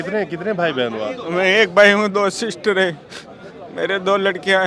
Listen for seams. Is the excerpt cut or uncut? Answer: uncut